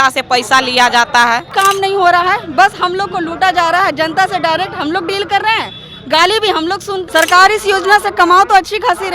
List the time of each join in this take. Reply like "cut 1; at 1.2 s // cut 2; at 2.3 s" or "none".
cut 1; at 1.5 s // cut 2; at 7.0 s